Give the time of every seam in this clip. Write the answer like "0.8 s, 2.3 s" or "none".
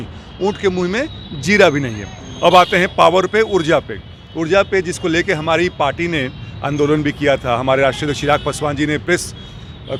none